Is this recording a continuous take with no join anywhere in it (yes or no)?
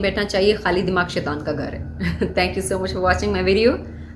yes